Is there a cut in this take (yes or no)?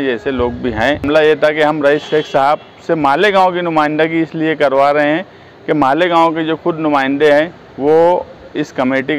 yes